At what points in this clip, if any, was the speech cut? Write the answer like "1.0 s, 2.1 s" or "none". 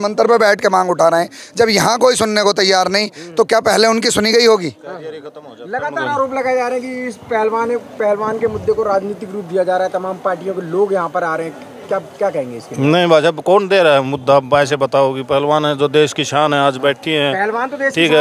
none